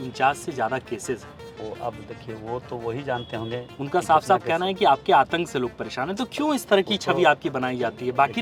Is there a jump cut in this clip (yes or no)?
no